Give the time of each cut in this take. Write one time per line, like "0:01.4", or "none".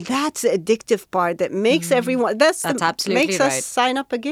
none

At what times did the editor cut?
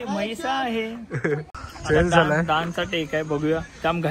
0:01.5

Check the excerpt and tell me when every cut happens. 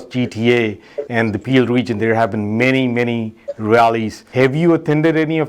0:04.2

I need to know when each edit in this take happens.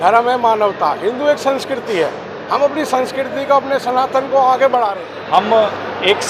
0:05.1

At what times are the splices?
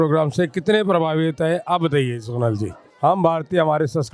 0:02.8

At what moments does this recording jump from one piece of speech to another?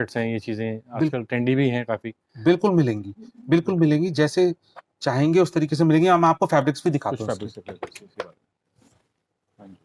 none

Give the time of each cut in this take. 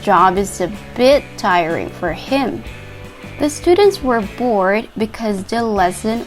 0:02.6

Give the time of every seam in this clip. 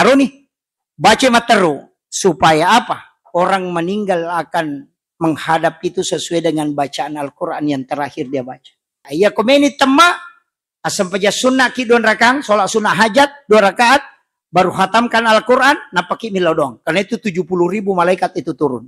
0:09.0

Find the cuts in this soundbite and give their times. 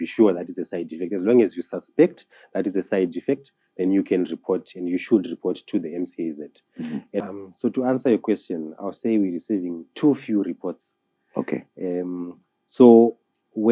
0:07.2

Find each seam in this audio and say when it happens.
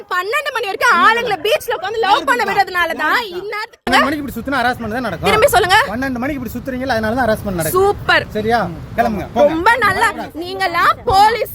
0:03.9

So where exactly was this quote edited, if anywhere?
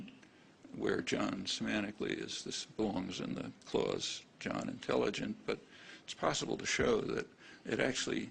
0:06.3

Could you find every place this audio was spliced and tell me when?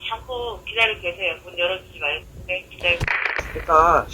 0:03.2

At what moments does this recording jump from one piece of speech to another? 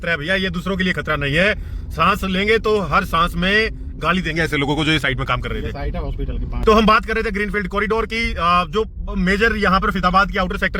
0:06.6

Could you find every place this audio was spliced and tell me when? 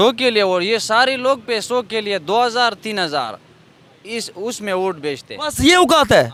none

